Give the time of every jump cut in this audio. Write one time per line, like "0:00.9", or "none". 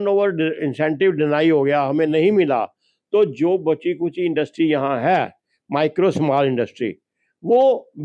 none